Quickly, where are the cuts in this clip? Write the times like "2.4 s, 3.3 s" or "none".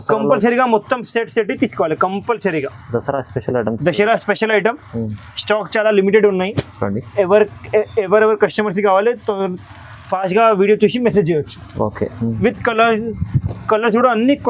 12.4 s